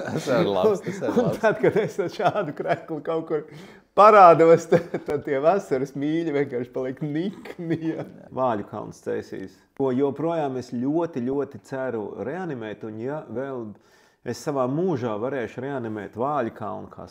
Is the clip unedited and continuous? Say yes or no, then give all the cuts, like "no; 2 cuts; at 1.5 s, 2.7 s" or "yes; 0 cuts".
no; 2 cuts; at 8.3 s, 9.6 s